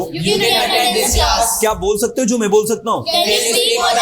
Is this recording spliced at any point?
no; 0 cuts

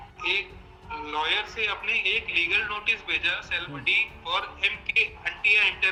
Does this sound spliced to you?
no; 0 cuts

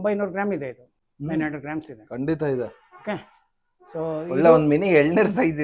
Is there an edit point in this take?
no; 0 cuts

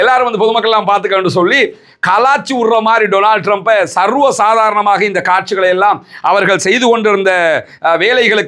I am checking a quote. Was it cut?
no; 0 cuts

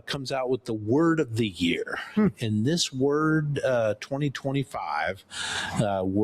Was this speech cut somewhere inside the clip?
no; 0 cuts

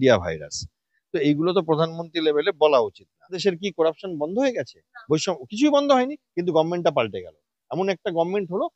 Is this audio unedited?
no; 1 cut; at 3.4 s

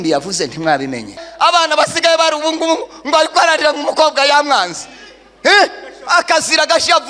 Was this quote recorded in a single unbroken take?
no; 1 cut; at 1.3 s

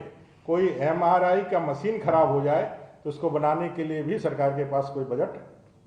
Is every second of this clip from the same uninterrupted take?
yes; 0 cuts

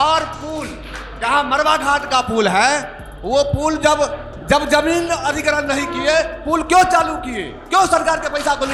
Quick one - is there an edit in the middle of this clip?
no; 0 cuts

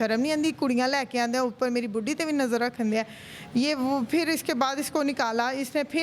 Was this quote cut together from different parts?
no; 0 cuts

